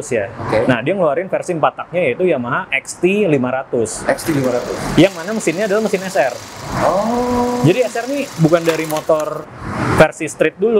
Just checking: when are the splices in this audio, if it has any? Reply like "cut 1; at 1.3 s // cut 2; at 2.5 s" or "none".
none